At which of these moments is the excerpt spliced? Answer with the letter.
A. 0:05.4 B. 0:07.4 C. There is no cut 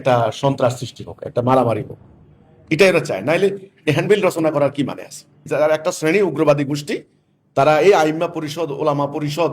A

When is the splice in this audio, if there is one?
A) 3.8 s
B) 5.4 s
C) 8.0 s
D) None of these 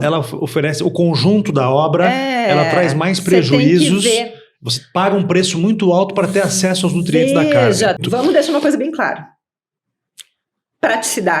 C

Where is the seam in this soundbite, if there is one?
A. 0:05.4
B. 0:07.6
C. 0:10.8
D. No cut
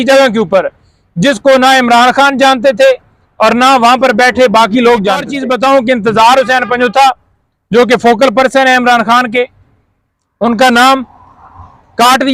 A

